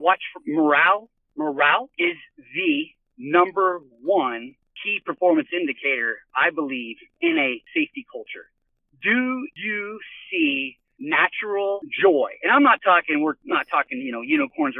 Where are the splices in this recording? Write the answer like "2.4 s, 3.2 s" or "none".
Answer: 1.2 s, 9.6 s